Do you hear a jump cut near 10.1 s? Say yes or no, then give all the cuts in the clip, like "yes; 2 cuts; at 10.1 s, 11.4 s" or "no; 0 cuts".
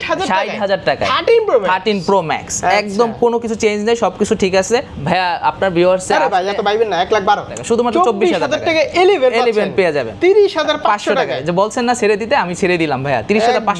yes; 3 cuts; at 4.9 s, 7.6 s, 10.1 s